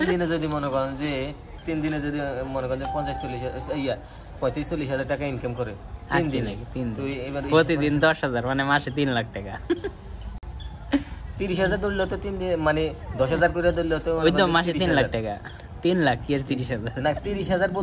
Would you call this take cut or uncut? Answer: uncut